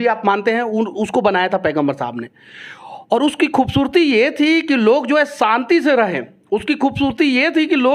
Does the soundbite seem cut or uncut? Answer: uncut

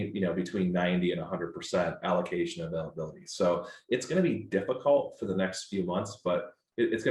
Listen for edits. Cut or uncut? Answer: uncut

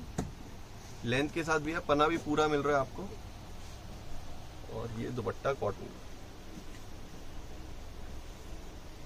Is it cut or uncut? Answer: uncut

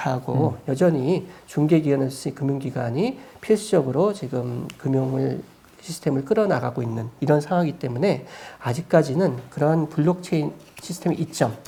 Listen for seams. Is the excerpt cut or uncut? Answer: uncut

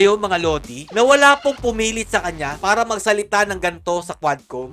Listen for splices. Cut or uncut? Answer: uncut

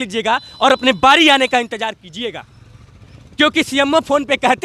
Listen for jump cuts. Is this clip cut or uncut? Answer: uncut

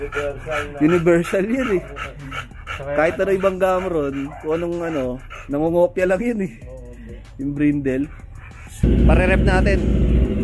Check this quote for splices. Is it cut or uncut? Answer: cut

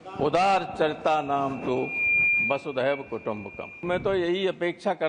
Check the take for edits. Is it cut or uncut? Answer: cut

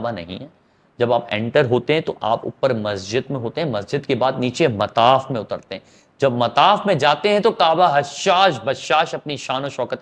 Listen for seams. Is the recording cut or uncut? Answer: uncut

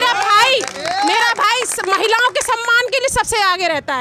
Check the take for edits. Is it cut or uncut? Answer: uncut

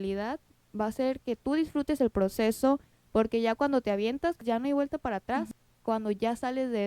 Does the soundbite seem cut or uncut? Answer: cut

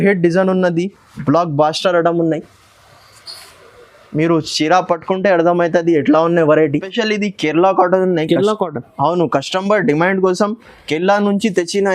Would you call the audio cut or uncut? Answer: cut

